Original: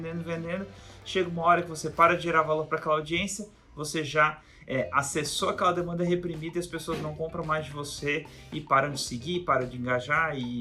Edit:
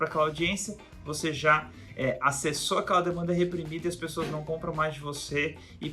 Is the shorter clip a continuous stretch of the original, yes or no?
yes